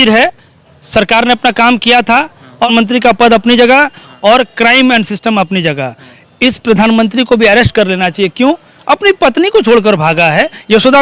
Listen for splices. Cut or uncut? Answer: cut